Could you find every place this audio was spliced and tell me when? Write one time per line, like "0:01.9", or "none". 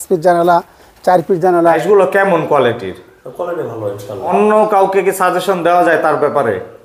0:01.8
0:04.3